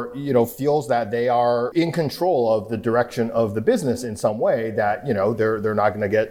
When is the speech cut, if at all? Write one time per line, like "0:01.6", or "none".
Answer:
0:01.7